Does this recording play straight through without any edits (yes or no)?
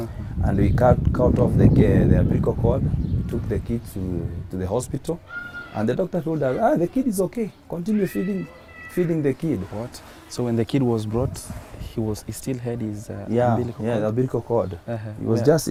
yes